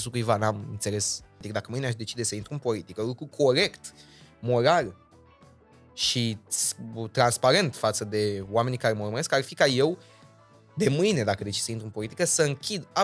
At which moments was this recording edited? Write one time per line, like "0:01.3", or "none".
0:01.4